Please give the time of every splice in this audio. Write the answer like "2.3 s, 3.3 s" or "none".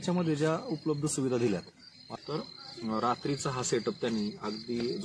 2.0 s

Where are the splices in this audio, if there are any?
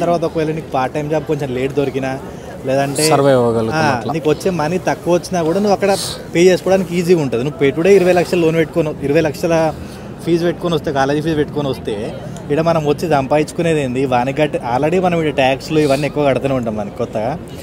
none

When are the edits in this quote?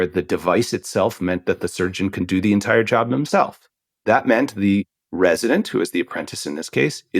4.0 s

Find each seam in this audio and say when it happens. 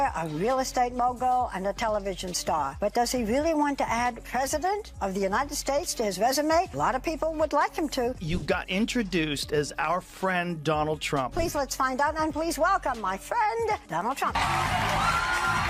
none

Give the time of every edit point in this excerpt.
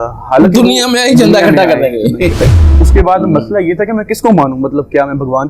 2.5 s

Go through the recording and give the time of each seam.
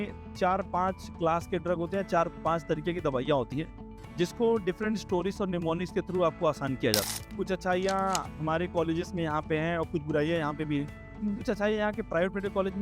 7.2 s

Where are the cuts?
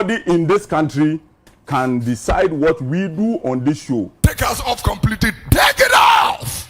4.3 s

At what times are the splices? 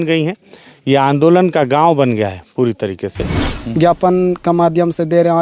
3.5 s

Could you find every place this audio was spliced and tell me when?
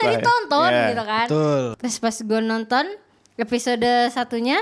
1.7 s

